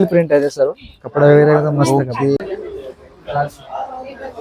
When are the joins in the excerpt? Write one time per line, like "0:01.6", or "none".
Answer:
0:02.4